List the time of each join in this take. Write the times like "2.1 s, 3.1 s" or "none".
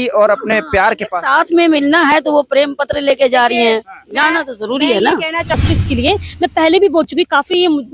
5.5 s